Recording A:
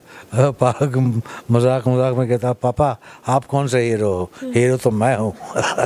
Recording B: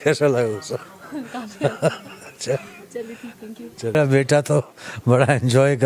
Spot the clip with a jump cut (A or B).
B